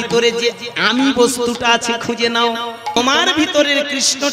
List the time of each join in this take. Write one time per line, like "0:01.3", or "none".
0:03.0